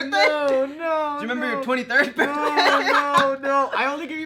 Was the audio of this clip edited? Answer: no; 0 cuts

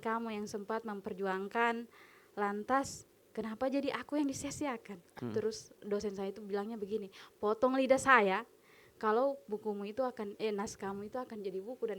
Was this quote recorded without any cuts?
no; 1 cut; at 5.1 s

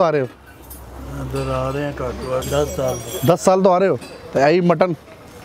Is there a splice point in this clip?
yes; 1 cut; at 2.5 s

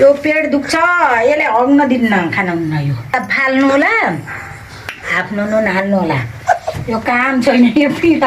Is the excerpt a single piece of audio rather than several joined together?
no; 1 cut; at 3.1 s

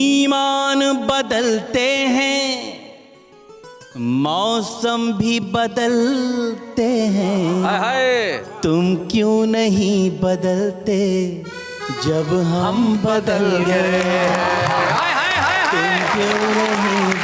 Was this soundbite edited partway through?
no; 0 cuts

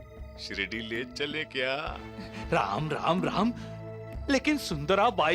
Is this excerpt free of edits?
yes; 0 cuts

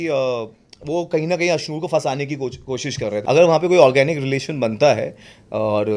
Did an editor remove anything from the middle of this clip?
yes; 1 cut; at 3.1 s

